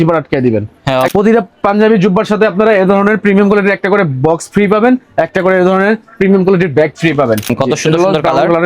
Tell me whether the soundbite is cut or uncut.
cut